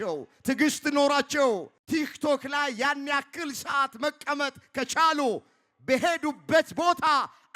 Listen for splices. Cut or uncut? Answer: cut